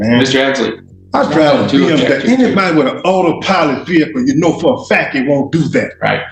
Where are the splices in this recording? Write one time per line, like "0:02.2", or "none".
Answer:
none